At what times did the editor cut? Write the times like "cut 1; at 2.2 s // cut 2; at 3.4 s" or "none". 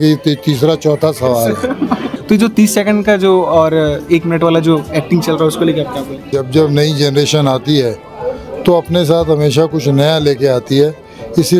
cut 1; at 2.1 s // cut 2; at 6.3 s

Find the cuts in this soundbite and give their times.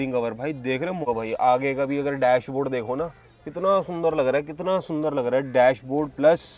cut 1; at 1.0 s

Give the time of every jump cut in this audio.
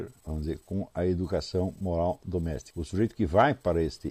cut 1; at 2.7 s

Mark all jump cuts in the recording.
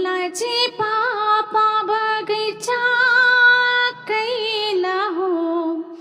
none

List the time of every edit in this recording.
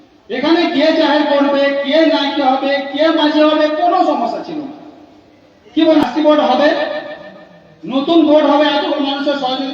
cut 1; at 6.0 s

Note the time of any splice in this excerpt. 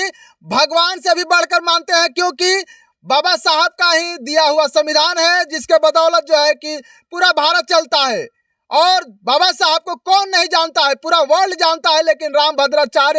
none

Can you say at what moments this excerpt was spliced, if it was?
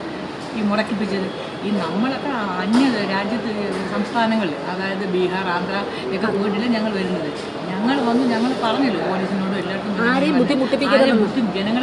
none

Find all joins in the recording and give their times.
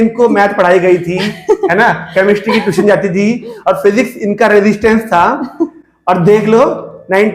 none

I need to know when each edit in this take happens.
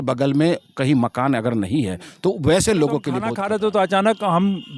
cut 1; at 3.3 s

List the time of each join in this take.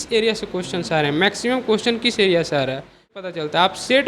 cut 1; at 3.1 s

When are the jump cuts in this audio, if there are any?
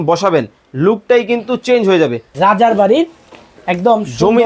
cut 1; at 2.3 s

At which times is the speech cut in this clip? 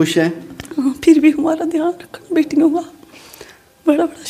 none

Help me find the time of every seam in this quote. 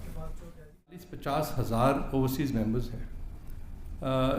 cut 1; at 1.1 s

